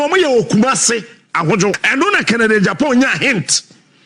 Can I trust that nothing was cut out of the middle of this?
no; 1 cut; at 1.8 s

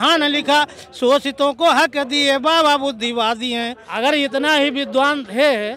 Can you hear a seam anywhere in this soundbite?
yes; 1 cut; at 3.9 s

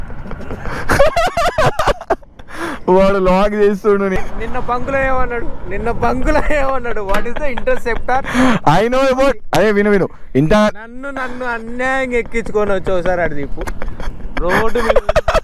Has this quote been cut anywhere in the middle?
yes; 1 cut; at 4.1 s

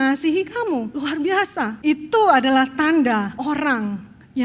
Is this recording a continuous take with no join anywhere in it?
no; 3 cuts; at 0.9 s, 1.8 s, 3.3 s

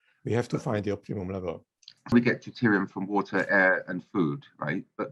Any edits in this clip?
yes; 1 cut; at 2.1 s

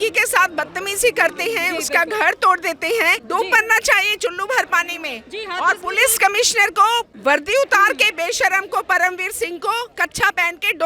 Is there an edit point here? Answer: yes; 2 cuts; at 3.2 s, 7.1 s

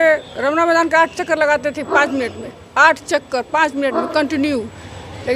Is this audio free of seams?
yes; 0 cuts

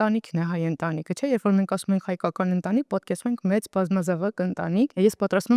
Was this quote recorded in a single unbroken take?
yes; 0 cuts

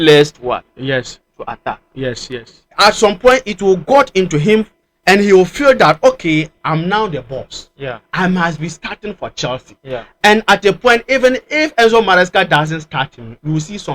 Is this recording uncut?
no; 1 cut; at 2.6 s

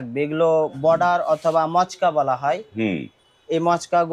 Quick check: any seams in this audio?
no; 0 cuts

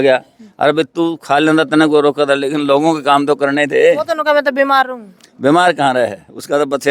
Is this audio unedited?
yes; 0 cuts

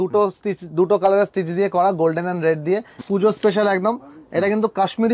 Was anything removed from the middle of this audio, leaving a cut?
yes; 1 cut; at 2.9 s

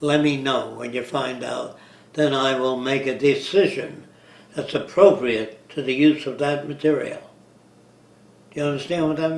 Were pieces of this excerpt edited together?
yes; 1 cut; at 2.0 s

